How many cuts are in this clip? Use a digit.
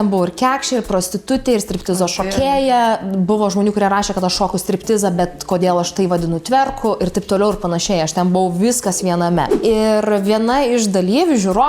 1